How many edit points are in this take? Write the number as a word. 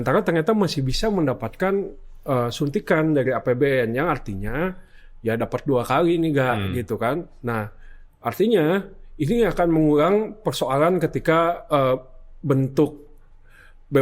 zero